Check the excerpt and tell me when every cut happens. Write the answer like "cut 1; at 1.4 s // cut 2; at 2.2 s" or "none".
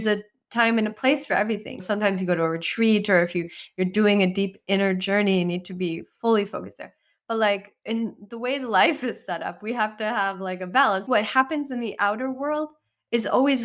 cut 1; at 1.8 s // cut 2; at 11.0 s

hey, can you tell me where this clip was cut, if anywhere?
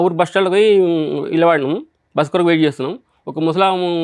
none

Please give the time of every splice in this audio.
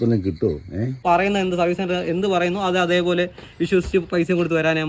cut 1; at 1.0 s

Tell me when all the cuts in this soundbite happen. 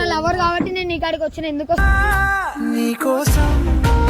cut 1; at 1.8 s

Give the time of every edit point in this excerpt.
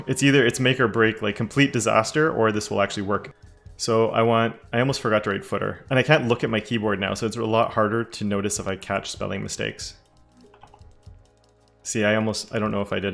cut 1; at 3.3 s

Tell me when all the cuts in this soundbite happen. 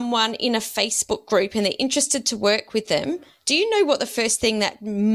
none

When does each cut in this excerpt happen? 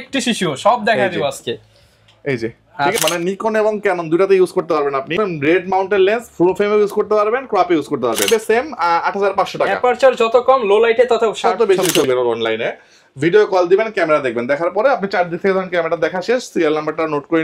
cut 1; at 3.0 s // cut 2; at 5.1 s // cut 3; at 8.3 s // cut 4; at 12.1 s

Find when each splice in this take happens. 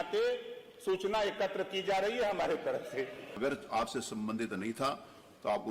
cut 1; at 3.3 s

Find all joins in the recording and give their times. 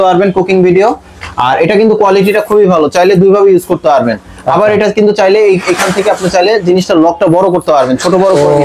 none

